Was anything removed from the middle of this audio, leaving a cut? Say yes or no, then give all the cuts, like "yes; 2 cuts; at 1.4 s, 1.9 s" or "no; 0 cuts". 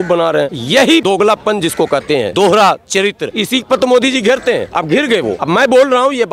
yes; 4 cuts; at 1.0 s, 2.3 s, 3.3 s, 5.4 s